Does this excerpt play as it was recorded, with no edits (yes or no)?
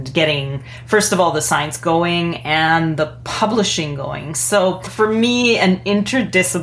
no